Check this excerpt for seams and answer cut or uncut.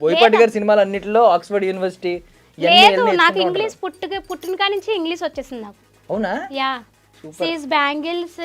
uncut